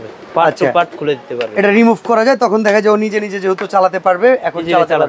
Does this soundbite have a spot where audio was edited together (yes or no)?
no